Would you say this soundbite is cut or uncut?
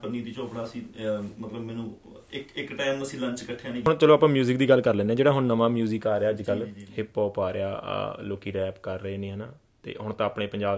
cut